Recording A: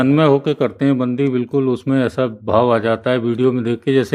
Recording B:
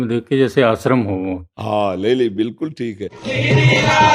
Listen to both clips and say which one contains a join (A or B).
B